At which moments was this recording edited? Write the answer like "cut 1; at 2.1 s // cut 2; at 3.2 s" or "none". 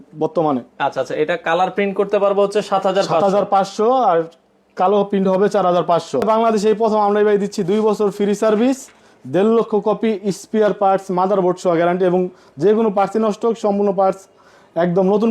cut 1; at 6.2 s